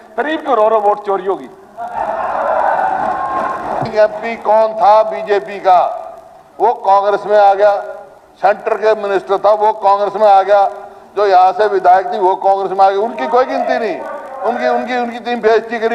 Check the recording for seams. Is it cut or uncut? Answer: cut